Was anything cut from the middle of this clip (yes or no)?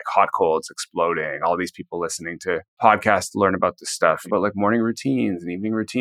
yes